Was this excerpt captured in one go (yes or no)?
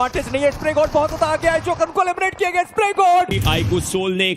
no